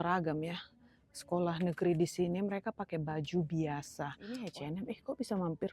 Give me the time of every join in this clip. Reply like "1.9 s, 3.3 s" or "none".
4.4 s